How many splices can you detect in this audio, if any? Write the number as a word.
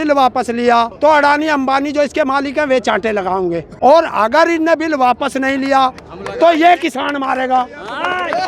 two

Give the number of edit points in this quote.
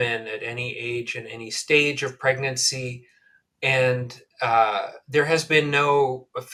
zero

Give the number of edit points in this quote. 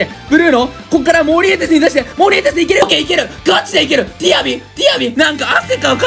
two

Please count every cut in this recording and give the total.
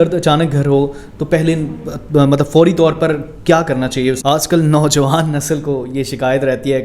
one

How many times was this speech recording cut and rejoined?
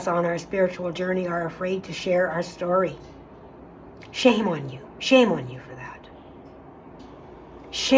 one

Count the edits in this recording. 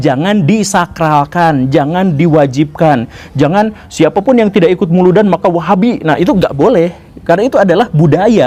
zero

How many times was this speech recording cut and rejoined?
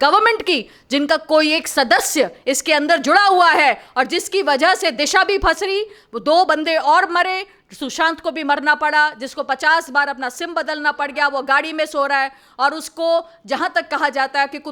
zero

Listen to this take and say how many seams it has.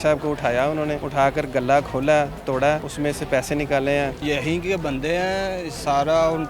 three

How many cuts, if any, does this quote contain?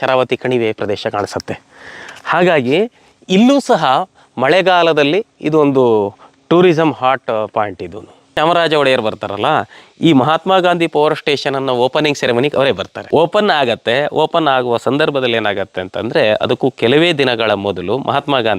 two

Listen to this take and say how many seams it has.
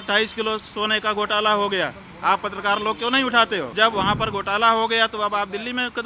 one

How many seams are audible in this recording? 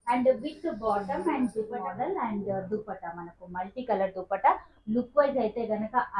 one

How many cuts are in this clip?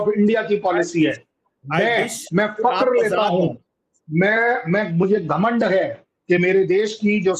zero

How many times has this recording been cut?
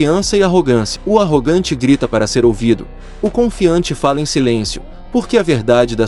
one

